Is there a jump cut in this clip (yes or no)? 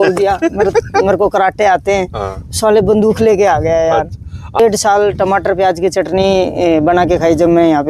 yes